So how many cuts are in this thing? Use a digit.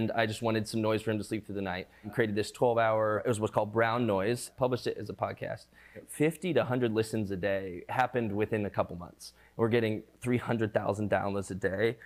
5